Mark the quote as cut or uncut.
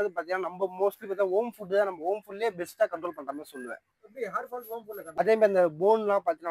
cut